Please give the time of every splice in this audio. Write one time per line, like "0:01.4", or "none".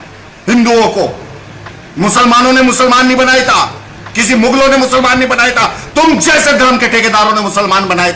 none